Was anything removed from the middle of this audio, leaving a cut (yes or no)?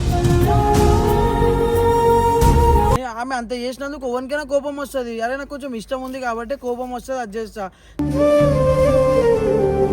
yes